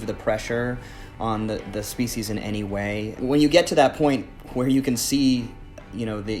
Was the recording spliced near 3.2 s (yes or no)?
yes